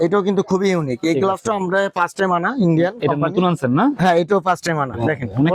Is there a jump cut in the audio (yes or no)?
no